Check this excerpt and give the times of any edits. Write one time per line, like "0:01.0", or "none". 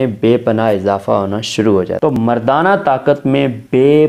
0:02.1